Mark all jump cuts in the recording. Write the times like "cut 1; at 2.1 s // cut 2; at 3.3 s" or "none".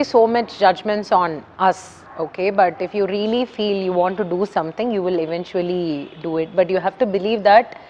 none